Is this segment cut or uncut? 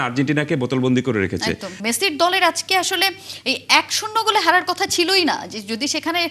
cut